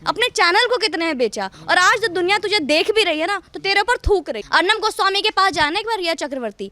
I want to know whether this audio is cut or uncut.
cut